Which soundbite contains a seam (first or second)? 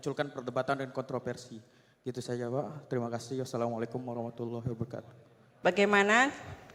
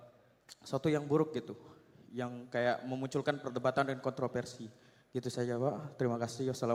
first